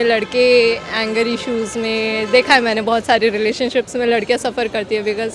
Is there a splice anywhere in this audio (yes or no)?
no